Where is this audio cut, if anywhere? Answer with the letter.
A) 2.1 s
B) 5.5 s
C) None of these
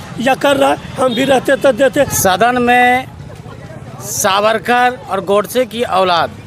A